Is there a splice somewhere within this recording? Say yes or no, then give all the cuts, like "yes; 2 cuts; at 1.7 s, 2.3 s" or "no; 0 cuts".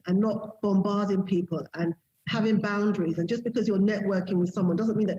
no; 0 cuts